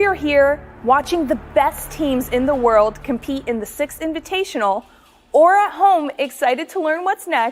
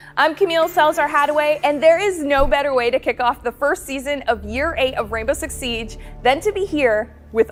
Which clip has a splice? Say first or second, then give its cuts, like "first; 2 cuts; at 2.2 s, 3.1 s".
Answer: first; 1 cut; at 3.4 s